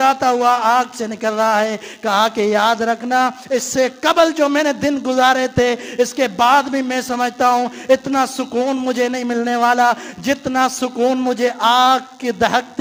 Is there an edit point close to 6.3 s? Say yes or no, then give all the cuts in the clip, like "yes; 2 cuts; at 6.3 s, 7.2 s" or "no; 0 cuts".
no; 0 cuts